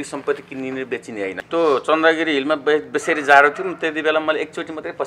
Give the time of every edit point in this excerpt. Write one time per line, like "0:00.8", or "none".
0:01.4

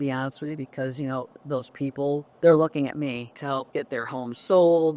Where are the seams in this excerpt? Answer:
0:02.3
0:03.4

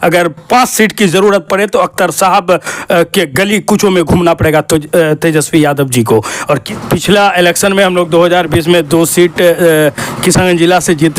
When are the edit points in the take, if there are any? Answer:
0:06.6

